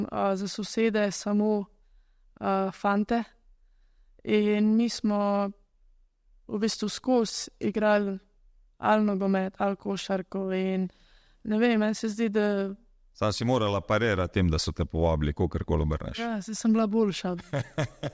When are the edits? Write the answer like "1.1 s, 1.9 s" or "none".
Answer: none